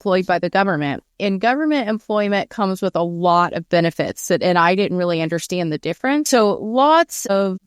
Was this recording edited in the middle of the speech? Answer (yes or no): yes